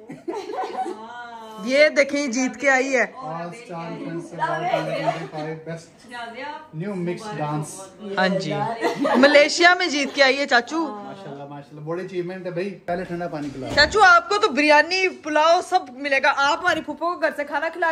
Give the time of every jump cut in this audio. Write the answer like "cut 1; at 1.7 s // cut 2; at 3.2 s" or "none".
none